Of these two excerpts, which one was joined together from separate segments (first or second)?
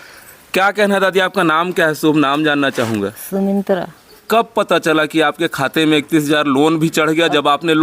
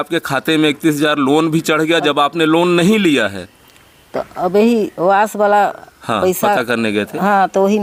first